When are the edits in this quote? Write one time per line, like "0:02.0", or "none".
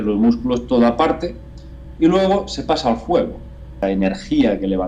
0:03.7